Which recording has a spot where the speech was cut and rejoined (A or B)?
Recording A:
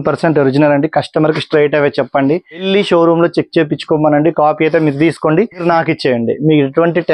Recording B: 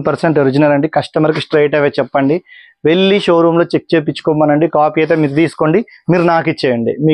A